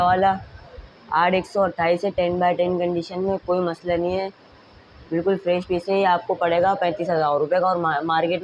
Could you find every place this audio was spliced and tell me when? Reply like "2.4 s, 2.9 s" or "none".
none